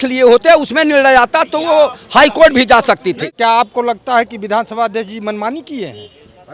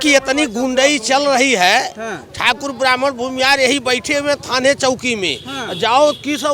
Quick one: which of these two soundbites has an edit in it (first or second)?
first